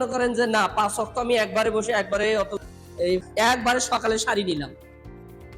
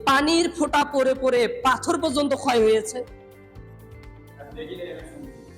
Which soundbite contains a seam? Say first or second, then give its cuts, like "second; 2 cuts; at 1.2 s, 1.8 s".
first; 1 cut; at 3.3 s